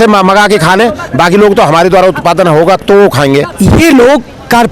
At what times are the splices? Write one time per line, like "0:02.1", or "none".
0:03.5